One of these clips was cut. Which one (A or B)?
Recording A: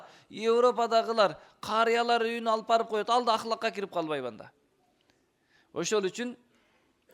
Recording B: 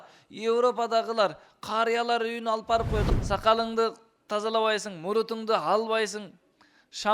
B